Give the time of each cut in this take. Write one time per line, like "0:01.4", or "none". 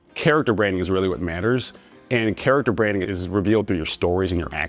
0:03.1